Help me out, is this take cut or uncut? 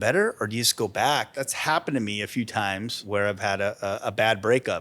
cut